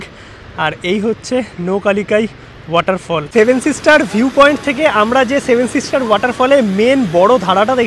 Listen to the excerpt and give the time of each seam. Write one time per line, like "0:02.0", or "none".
0:03.2